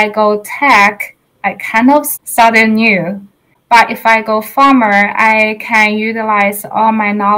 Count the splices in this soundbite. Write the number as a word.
two